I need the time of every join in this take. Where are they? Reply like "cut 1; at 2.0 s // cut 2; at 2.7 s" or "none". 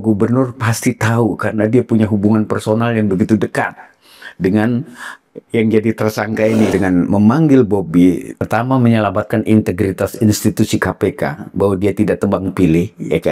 cut 1; at 6.7 s // cut 2; at 8.3 s